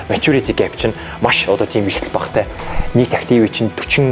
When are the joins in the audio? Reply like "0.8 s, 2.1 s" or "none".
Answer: 2.5 s